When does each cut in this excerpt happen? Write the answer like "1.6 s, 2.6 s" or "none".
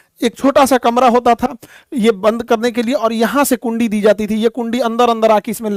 none